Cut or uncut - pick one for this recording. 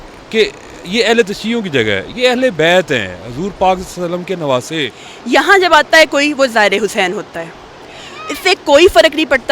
cut